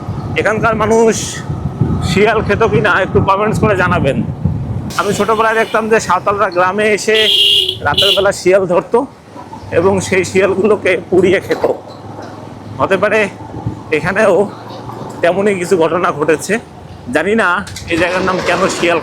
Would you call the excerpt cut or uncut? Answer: uncut